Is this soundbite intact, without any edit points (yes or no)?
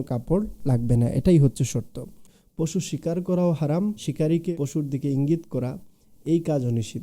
no